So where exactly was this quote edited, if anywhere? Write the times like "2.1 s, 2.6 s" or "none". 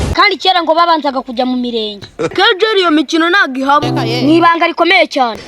2.3 s